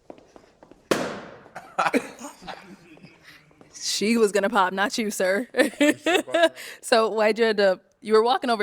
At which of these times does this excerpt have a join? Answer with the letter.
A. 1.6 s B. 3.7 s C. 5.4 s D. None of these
D